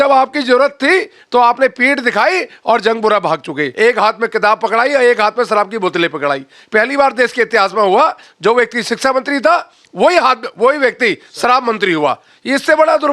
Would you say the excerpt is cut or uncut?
cut